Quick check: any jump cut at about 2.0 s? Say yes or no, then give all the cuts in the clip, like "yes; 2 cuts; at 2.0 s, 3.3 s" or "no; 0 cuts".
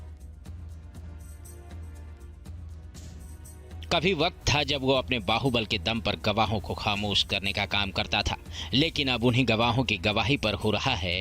no; 1 cut; at 3.8 s